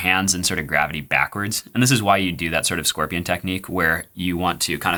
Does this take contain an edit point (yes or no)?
no